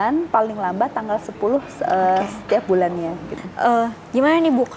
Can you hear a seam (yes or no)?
yes